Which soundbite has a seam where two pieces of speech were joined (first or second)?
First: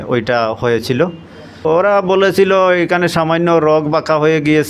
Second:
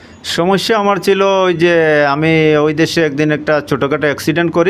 first